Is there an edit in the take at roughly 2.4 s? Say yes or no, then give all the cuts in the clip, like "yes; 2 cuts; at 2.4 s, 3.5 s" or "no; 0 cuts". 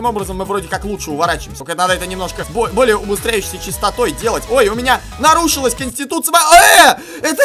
yes; 2 cuts; at 1.5 s, 2.4 s